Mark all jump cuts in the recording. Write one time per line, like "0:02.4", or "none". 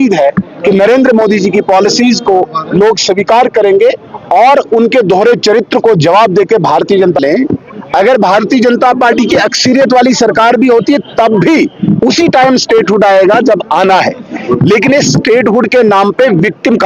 0:07.2